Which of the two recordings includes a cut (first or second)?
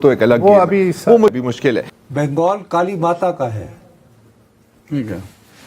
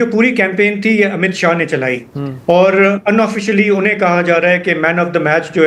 first